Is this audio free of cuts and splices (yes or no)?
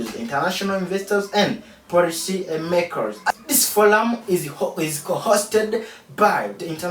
no